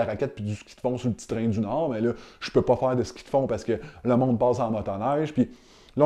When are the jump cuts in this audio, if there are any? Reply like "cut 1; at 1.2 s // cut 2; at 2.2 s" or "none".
none